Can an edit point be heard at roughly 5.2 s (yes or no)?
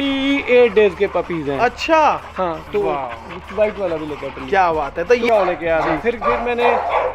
yes